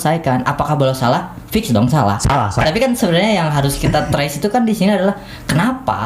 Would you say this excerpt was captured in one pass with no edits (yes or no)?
no